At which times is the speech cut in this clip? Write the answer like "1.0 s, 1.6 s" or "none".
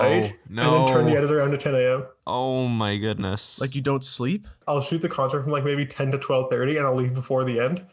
4.6 s